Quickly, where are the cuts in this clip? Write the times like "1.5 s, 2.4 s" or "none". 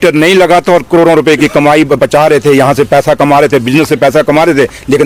none